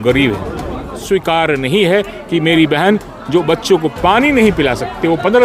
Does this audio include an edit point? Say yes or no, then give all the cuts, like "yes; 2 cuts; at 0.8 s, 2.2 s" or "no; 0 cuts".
yes; 1 cut; at 1.0 s